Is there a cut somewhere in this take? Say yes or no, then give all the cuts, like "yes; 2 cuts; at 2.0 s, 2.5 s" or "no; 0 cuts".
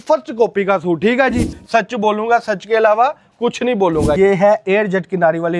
yes; 2 cuts; at 1.6 s, 4.2 s